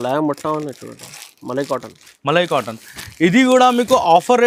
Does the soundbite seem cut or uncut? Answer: uncut